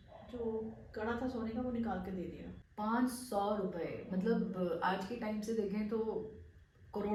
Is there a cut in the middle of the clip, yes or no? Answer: no